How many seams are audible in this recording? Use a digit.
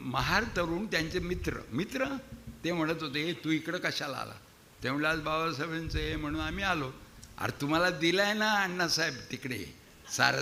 0